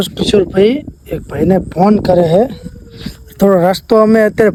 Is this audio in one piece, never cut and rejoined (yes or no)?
yes